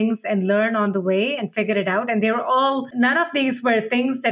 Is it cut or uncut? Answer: cut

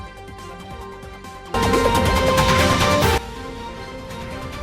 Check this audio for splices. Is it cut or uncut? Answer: cut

